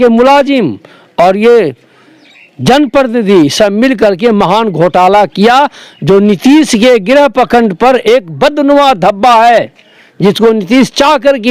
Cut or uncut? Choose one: uncut